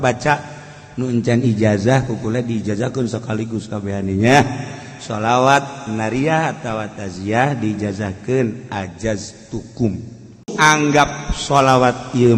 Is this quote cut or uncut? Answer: cut